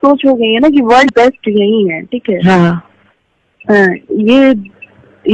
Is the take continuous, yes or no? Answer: no